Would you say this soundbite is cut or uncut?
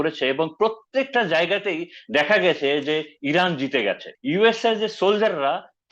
cut